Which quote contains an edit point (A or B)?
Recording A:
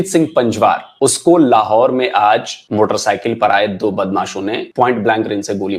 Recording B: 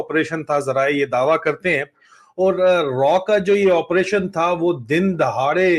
A